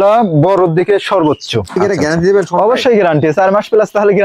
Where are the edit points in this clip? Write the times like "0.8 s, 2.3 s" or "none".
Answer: 1.7 s